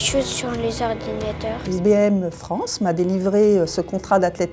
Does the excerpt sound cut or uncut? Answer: cut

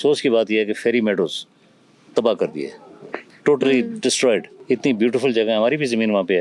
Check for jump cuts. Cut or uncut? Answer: uncut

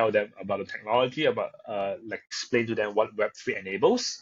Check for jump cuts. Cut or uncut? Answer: cut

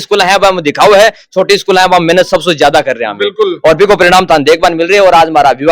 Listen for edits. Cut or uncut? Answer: uncut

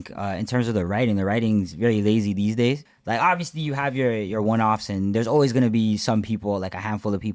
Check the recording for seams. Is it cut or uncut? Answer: cut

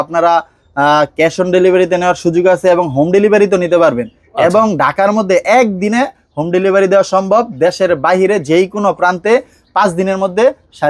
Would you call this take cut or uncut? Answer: uncut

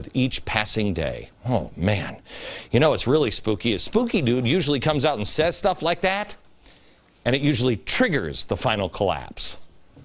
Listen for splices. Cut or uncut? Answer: cut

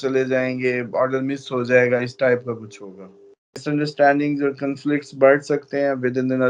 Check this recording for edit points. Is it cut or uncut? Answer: cut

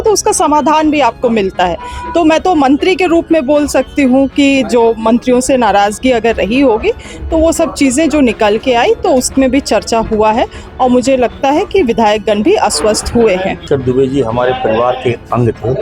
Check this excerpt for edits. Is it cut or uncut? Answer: cut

